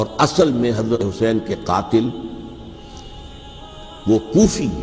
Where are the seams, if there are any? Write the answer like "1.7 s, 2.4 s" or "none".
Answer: 1.0 s